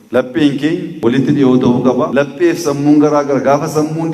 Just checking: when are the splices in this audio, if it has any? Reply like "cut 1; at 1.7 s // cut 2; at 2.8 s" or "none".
cut 1; at 0.9 s // cut 2; at 2.1 s

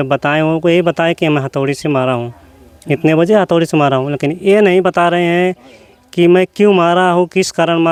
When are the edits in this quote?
none

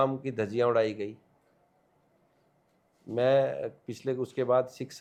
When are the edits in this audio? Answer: none

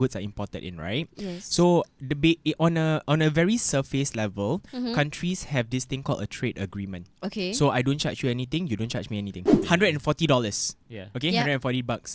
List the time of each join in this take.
cut 1; at 9.6 s

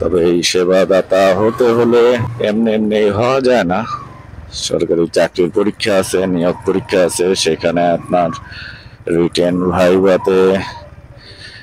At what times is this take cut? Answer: cut 1; at 2.3 s

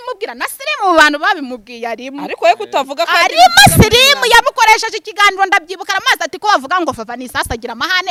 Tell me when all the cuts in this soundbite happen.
none

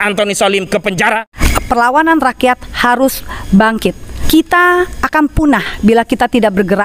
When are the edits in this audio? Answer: cut 1; at 1.3 s // cut 2; at 4.1 s

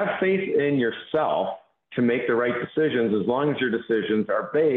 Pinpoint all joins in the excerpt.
none

